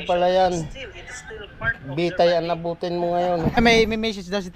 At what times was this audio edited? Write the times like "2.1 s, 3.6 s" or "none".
3.6 s